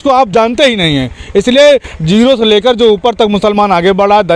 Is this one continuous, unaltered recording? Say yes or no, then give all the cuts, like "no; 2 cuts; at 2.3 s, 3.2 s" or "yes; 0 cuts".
yes; 0 cuts